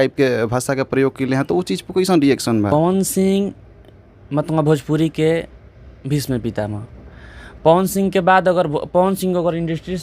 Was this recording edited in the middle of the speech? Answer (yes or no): yes